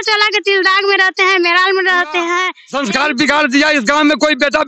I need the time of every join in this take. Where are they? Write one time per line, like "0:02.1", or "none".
0:02.6